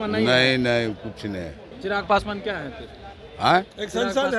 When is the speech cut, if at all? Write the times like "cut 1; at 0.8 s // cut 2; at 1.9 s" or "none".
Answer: cut 1; at 1.6 s